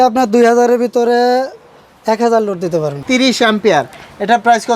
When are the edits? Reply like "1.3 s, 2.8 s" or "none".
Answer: 3.0 s